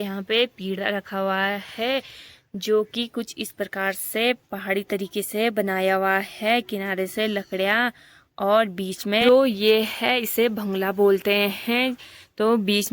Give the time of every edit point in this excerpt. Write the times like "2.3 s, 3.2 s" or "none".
none